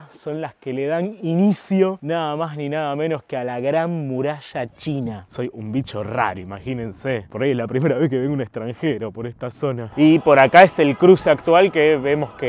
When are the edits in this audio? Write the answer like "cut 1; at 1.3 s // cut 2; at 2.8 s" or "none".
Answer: cut 1; at 5.2 s // cut 2; at 9.8 s